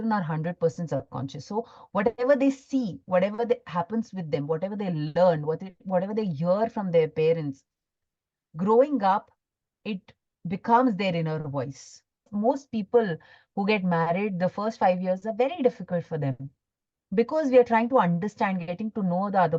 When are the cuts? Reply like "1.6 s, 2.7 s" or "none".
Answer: 12.3 s